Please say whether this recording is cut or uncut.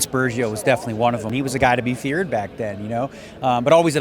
cut